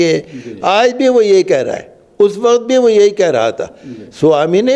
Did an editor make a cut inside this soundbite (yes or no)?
no